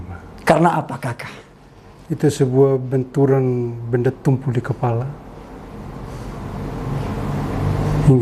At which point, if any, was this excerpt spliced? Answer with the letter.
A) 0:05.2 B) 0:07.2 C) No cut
C